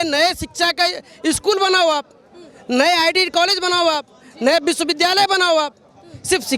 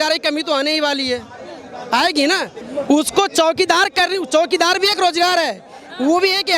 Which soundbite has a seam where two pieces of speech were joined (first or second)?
second